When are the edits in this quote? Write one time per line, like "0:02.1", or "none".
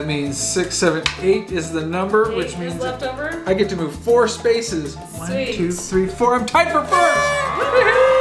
none